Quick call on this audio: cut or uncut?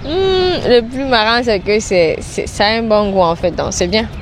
uncut